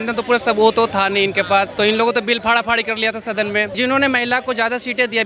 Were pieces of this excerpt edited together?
yes; 2 cuts; at 1.7 s, 3.7 s

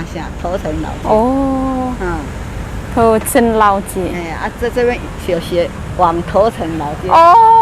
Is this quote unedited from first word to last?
yes; 0 cuts

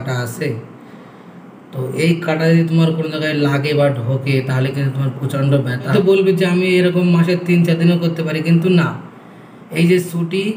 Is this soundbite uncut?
no; 1 cut; at 5.9 s

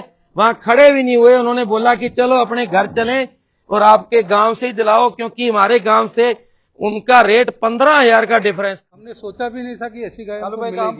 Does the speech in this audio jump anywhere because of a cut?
yes; 1 cut; at 8.7 s

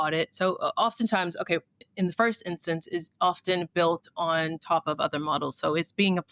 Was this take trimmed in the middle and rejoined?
no; 0 cuts

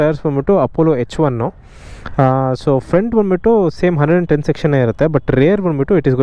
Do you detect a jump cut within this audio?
no; 0 cuts

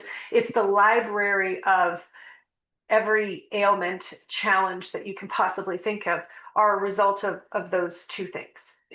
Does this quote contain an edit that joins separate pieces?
no; 0 cuts

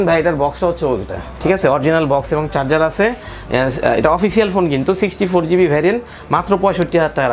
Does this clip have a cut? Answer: no; 0 cuts

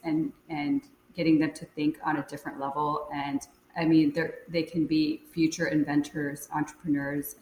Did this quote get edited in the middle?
yes; 1 cut; at 3.6 s

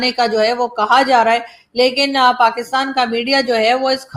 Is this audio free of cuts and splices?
yes; 0 cuts

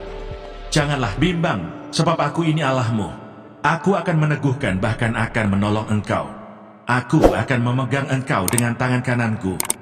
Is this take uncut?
yes; 0 cuts

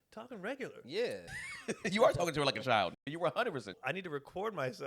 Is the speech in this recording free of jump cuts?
no; 2 cuts; at 1.3 s, 3.7 s

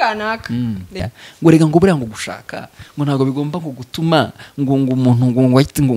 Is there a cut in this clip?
yes; 1 cut; at 1.1 s

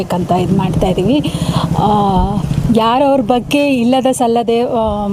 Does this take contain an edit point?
no; 0 cuts

